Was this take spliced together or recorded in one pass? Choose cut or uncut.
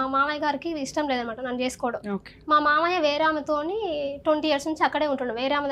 uncut